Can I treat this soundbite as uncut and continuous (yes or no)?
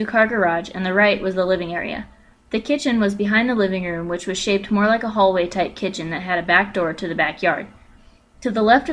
yes